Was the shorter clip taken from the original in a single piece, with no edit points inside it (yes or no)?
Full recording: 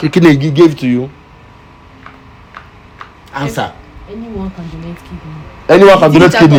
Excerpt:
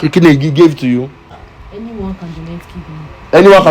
no